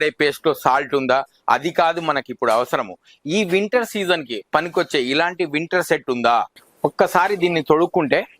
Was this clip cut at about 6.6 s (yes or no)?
yes